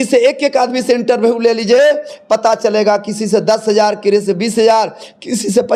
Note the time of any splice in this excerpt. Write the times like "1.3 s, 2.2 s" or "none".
none